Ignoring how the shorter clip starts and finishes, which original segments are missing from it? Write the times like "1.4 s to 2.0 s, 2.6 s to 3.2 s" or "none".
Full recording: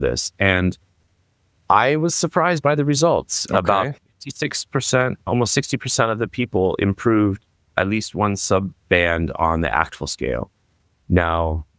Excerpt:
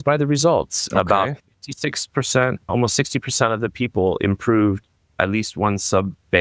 none